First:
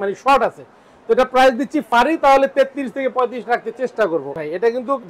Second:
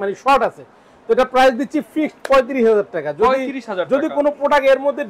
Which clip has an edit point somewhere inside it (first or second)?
first